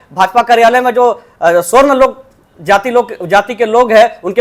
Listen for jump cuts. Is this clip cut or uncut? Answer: uncut